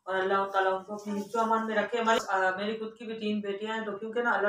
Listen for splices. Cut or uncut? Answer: cut